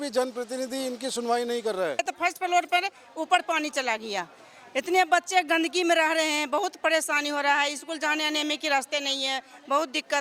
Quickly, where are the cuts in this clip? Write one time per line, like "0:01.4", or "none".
0:02.0